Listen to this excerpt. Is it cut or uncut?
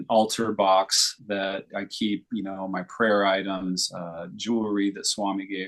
uncut